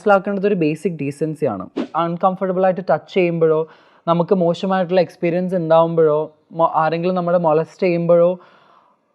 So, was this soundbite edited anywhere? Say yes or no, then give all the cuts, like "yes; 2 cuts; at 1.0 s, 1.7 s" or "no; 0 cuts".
yes; 1 cut; at 1.9 s